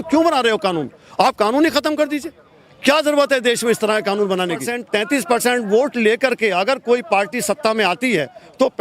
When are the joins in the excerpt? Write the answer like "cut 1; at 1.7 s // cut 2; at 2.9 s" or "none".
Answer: cut 1; at 4.8 s